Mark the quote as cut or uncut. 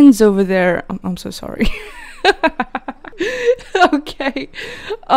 uncut